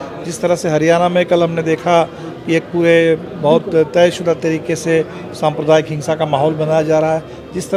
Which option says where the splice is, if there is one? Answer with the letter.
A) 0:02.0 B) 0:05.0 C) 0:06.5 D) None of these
D